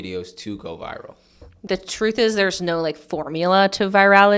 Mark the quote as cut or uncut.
cut